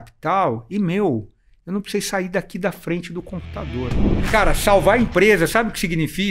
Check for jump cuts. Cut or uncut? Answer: cut